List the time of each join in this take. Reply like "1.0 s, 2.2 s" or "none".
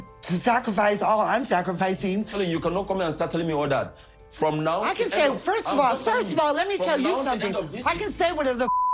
2.3 s